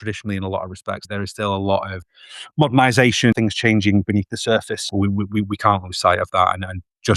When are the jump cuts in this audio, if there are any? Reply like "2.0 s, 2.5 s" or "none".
1.0 s, 2.1 s, 3.3 s, 4.9 s